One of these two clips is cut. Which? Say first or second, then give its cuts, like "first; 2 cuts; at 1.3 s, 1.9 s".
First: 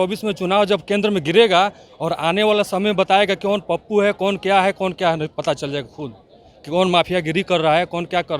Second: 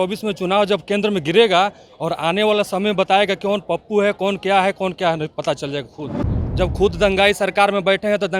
second; 1 cut; at 6.4 s